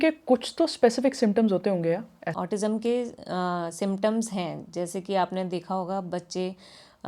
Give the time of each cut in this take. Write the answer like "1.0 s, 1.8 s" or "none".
2.3 s